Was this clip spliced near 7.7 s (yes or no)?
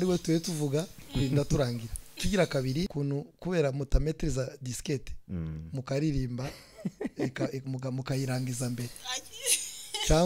no